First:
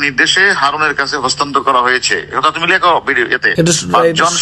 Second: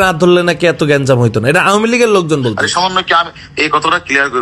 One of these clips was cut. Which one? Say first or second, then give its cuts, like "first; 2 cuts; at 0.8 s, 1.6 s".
first; 1 cut; at 3.5 s